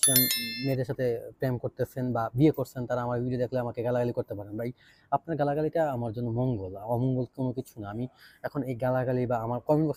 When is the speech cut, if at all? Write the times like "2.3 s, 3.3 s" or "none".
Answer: none